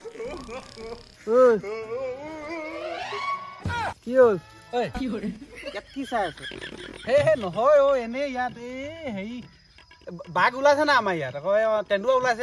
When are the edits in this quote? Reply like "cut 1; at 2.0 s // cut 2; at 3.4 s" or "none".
none